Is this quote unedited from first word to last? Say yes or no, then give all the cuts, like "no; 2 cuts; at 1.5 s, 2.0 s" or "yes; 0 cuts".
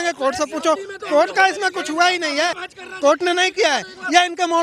no; 1 cut; at 2.6 s